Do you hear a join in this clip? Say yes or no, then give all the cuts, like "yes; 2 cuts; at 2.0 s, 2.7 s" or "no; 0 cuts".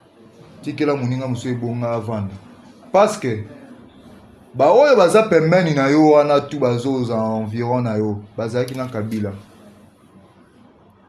no; 0 cuts